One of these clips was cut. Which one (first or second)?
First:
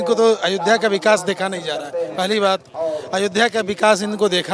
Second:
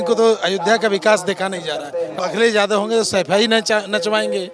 second